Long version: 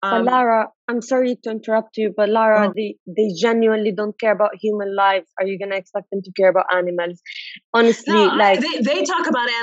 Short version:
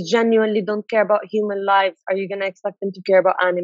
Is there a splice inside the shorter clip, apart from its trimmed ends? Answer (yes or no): no